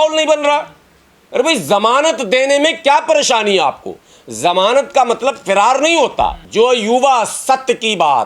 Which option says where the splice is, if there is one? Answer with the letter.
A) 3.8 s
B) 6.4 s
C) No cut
B